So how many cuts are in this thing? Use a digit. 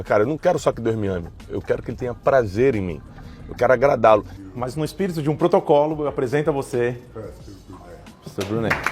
1